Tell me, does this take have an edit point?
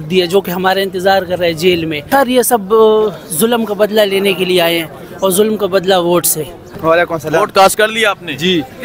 yes; 2 cuts; at 2.0 s, 6.6 s

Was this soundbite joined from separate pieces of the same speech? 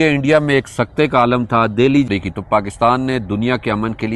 yes; 1 cut; at 2.1 s

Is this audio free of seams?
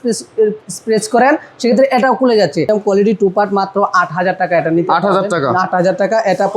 no; 1 cut; at 2.7 s

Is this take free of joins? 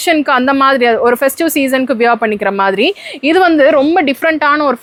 yes; 0 cuts

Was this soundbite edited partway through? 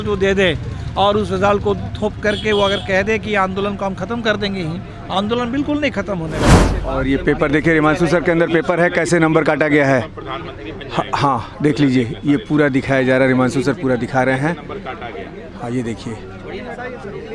yes; 1 cut; at 6.6 s

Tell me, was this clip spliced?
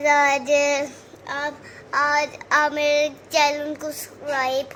no; 0 cuts

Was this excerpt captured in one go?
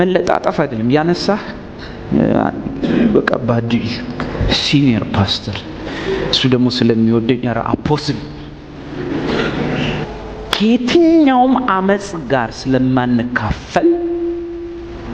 no; 1 cut; at 10.0 s

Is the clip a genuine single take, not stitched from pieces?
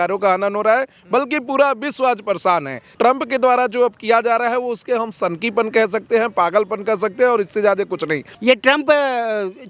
no; 2 cuts; at 2.8 s, 8.3 s

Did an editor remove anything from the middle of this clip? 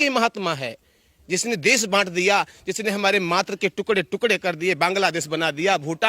no; 0 cuts

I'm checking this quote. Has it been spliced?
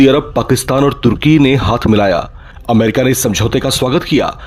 no; 0 cuts

